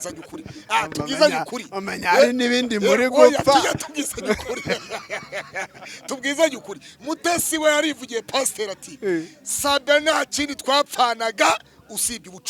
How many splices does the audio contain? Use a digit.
0